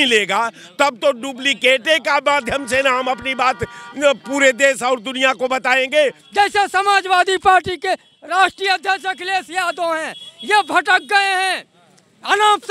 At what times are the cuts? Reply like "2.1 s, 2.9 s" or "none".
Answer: 6.2 s